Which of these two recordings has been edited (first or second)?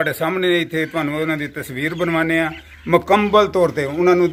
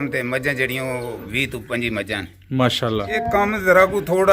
second